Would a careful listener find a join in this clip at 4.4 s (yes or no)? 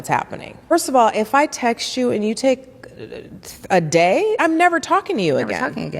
yes